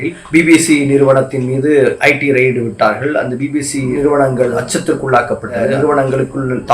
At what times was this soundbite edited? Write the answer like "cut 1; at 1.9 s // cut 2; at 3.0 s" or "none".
cut 1; at 5.7 s